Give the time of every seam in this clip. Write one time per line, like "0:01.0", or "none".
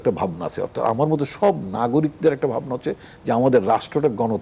none